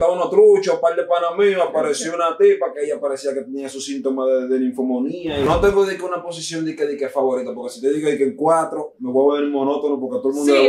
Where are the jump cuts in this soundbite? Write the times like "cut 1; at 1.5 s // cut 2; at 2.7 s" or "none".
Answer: cut 1; at 5.5 s